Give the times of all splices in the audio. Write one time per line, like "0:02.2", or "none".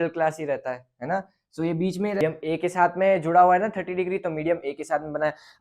0:02.2